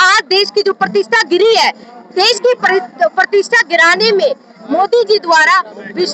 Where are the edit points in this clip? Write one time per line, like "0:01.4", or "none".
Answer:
none